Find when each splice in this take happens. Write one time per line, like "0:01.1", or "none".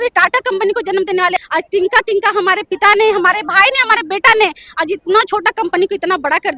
0:01.4